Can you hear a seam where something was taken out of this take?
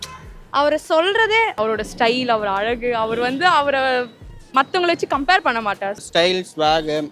yes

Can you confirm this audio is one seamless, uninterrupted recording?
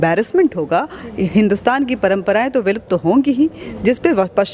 no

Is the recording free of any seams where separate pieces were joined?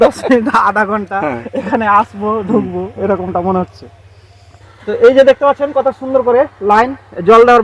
yes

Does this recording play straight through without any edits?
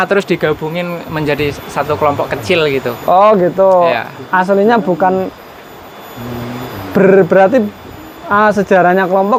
yes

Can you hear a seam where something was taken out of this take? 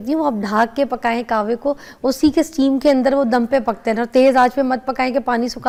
no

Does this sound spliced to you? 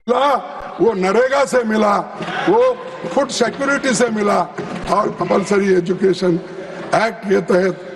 no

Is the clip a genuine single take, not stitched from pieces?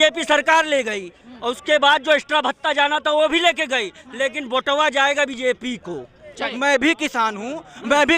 no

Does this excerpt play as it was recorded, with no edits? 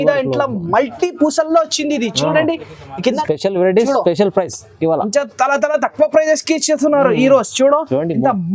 no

